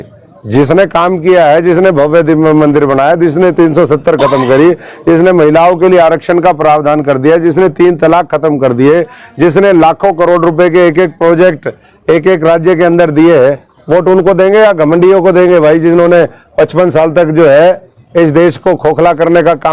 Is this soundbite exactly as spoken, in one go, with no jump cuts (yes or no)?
yes